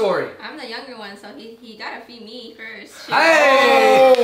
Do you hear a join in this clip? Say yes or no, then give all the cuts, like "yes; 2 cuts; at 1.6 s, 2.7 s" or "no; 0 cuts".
no; 0 cuts